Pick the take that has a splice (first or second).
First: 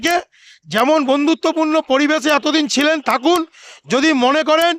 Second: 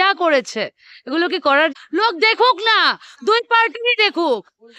second